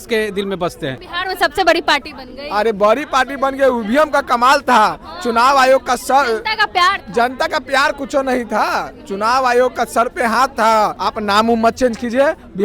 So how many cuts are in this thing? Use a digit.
2